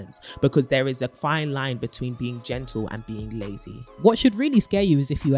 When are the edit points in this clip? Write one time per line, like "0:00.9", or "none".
0:03.9